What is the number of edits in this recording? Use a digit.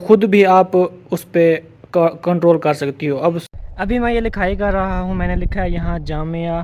1